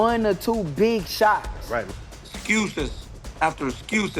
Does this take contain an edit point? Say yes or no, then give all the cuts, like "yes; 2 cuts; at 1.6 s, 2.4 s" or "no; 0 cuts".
yes; 1 cut; at 1.9 s